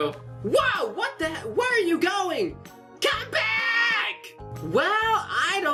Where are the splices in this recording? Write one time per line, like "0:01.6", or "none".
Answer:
none